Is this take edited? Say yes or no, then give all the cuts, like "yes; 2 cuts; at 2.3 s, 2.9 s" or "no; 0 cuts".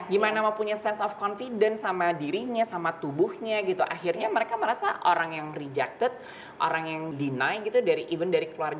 yes; 1 cut; at 7.1 s